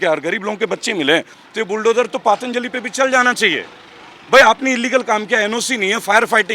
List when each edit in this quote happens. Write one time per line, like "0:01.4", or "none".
0:01.4